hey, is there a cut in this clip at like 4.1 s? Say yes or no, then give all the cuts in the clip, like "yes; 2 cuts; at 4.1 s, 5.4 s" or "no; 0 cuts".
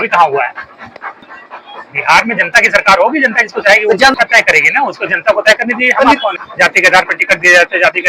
yes; 3 cuts; at 1.3 s, 4.1 s, 6.4 s